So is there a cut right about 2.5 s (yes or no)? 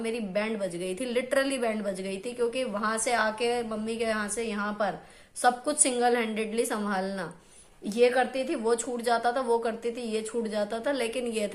no